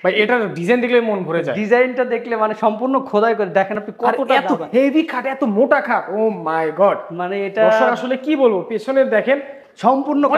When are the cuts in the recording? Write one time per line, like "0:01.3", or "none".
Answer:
none